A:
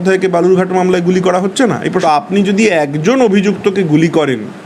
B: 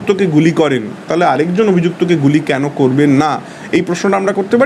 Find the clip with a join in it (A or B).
A